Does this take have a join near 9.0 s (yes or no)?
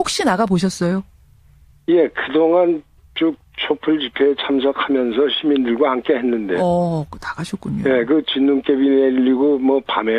yes